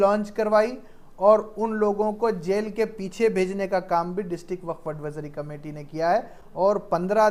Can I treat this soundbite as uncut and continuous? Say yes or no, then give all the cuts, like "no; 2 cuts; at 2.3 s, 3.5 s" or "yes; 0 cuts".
yes; 0 cuts